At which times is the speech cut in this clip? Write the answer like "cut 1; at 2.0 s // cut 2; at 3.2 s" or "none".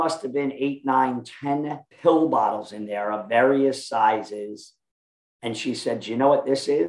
cut 1; at 1.8 s